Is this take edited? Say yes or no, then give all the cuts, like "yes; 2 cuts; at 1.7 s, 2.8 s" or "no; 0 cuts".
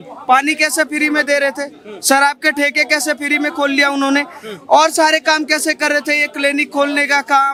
no; 0 cuts